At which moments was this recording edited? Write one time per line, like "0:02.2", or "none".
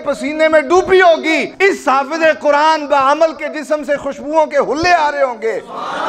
0:01.5